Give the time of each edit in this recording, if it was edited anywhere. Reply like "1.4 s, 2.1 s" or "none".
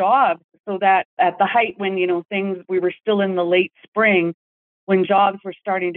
1.1 s